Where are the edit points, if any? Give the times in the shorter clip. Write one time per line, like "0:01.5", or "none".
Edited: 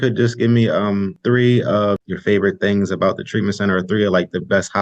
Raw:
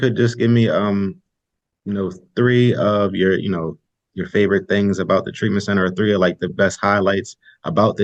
0:01.2
0:02.0